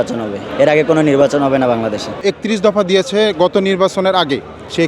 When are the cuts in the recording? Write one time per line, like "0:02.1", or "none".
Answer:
0:02.2